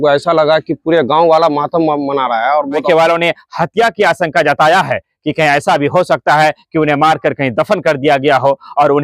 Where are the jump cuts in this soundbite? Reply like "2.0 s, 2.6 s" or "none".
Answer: 2.8 s